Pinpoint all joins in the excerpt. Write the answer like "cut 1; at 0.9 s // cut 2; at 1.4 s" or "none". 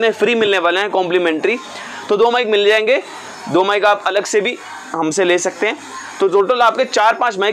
none